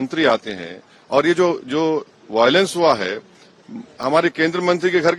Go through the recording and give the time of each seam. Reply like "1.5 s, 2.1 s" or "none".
none